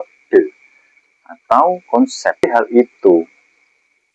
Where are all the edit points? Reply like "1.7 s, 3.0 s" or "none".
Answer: 2.5 s

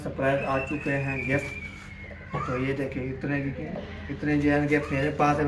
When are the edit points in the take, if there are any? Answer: none

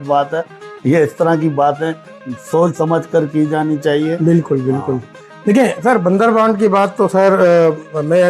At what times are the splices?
none

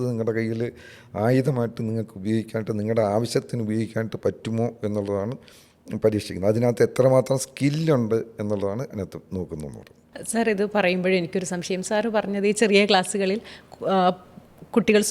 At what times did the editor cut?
none

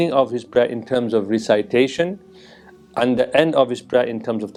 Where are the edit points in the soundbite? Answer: none

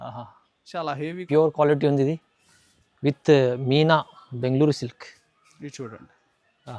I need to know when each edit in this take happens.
1.2 s

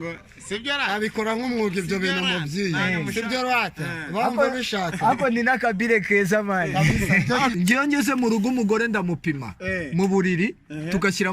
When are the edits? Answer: 7.5 s

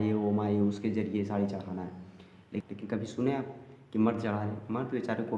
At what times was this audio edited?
2.6 s

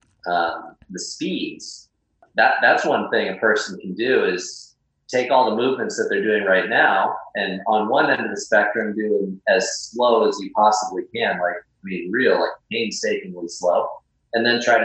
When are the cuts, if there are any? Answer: 2.2 s

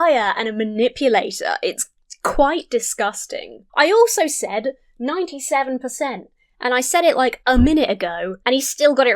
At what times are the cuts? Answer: 7.4 s, 8.3 s

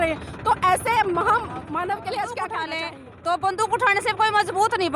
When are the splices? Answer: 2.7 s

